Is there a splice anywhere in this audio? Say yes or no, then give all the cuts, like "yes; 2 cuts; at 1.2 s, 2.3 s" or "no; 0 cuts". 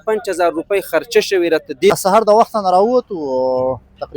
yes; 1 cut; at 1.9 s